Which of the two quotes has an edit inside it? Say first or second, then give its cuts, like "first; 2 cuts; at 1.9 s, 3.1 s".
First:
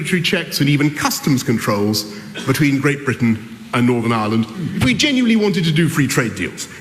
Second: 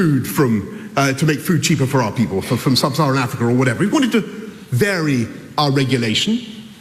first; 1 cut; at 4.4 s